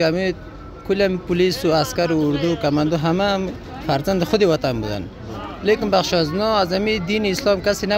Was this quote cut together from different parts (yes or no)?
no